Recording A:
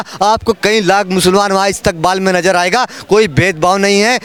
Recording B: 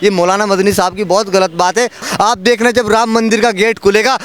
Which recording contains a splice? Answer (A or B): B